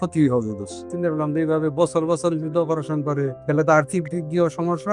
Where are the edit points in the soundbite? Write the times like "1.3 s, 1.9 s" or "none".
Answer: 0.9 s, 3.4 s